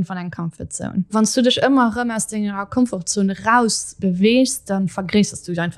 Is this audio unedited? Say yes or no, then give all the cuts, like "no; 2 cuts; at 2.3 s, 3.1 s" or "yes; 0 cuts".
no; 1 cut; at 1.1 s